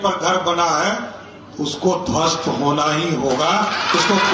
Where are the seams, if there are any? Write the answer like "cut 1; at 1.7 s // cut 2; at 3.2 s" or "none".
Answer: none